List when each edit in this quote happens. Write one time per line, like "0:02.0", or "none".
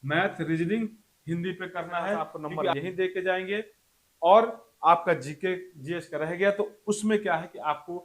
0:02.7